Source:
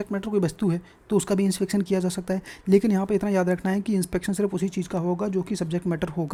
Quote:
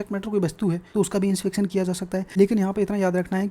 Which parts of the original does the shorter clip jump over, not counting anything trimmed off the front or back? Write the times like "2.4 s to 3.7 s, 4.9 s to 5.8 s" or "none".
0.8 s to 1.0 s, 2.4 s to 2.6 s